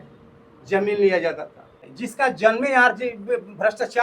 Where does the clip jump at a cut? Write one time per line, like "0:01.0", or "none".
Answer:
0:01.9